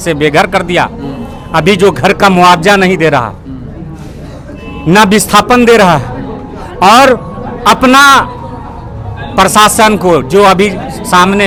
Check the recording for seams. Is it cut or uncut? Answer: uncut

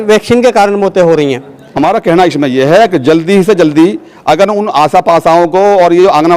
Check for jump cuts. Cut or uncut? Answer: cut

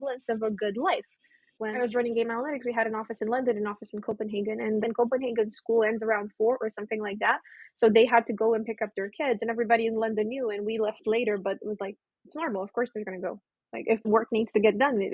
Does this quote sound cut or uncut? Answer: cut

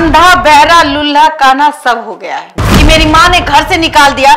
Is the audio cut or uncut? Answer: cut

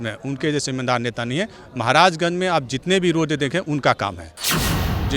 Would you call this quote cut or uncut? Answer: uncut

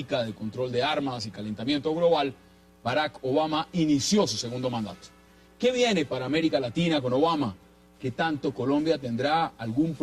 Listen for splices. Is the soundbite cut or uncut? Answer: cut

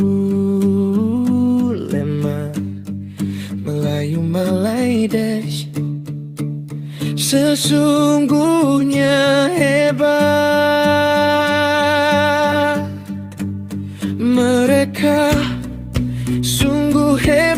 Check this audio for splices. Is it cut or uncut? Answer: uncut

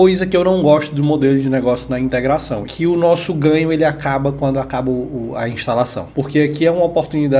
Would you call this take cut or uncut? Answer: cut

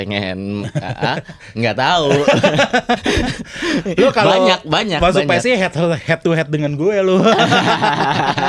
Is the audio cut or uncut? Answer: uncut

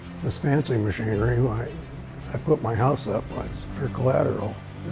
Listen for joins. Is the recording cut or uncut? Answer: uncut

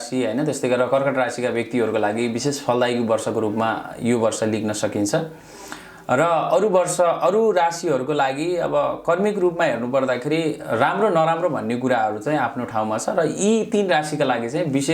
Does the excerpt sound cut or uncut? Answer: uncut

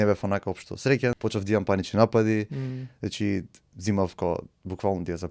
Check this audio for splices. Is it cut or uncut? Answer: cut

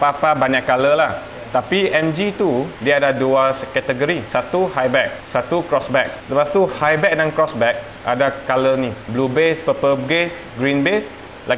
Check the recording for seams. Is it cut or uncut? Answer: cut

